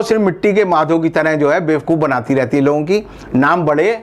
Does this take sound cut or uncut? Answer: uncut